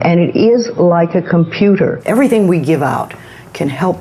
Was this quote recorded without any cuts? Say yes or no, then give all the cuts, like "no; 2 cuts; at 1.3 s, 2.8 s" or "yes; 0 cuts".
no; 1 cut; at 2.0 s